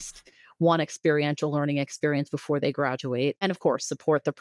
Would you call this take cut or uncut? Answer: cut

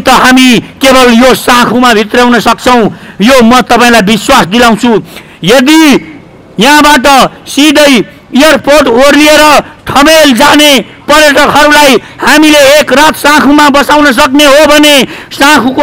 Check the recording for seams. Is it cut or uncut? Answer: uncut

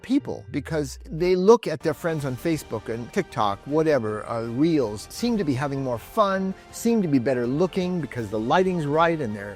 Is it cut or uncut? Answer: cut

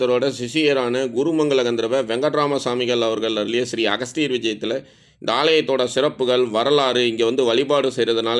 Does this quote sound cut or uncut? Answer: uncut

